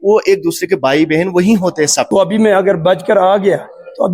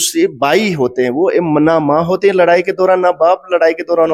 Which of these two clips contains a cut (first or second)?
first